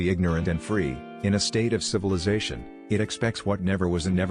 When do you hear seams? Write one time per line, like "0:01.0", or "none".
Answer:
none